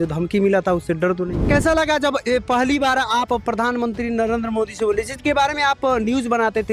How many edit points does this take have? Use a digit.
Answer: 1